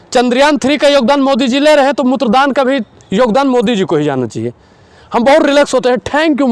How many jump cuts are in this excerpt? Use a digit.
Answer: 0